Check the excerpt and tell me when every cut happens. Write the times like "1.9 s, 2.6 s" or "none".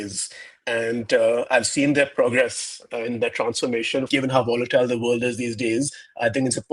4.1 s